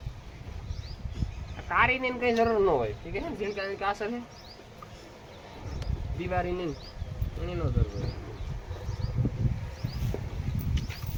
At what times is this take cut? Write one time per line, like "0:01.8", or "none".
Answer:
none